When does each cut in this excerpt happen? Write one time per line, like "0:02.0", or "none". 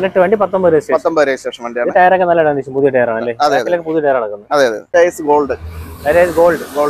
0:04.9